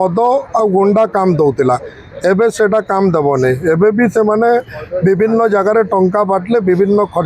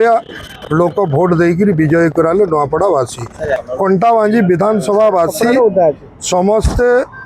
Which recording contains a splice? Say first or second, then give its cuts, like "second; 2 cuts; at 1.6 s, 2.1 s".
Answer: second; 1 cut; at 3.6 s